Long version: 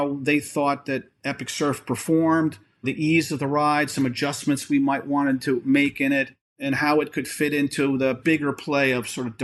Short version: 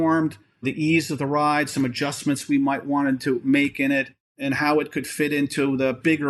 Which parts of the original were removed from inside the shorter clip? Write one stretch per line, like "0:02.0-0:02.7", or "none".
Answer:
none